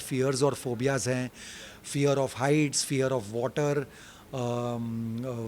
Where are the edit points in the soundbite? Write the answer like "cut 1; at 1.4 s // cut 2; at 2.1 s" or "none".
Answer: none